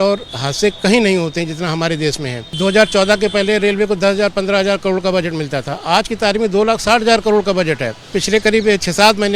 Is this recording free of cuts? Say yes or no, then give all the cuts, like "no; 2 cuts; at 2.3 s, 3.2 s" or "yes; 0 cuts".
no; 2 cuts; at 2.6 s, 8.1 s